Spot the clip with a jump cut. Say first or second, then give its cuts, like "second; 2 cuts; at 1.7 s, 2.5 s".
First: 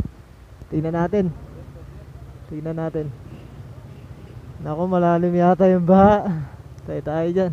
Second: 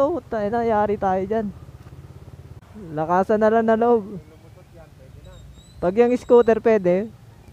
second; 1 cut; at 2.8 s